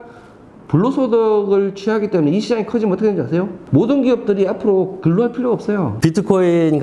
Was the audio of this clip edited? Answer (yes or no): yes